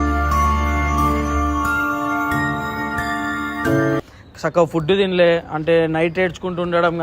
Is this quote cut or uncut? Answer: cut